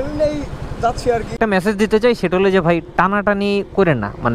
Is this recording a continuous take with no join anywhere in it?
no; 1 cut; at 1.4 s

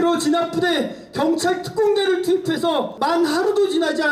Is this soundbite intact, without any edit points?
no; 1 cut; at 2.9 s

